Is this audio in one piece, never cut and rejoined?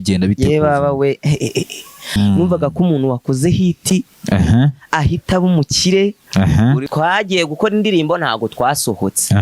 no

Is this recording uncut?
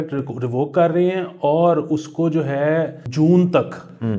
no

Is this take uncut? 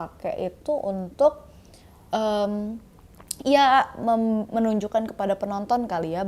yes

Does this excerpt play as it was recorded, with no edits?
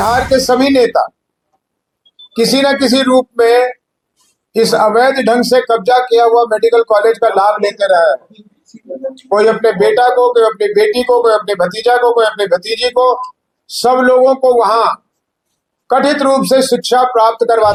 yes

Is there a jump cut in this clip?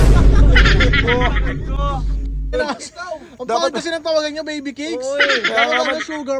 no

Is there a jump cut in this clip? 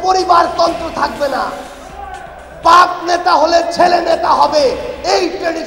no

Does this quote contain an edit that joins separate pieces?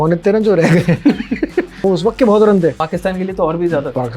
yes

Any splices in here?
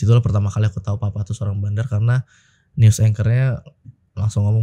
no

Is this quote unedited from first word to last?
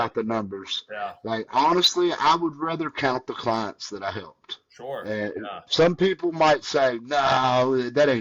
yes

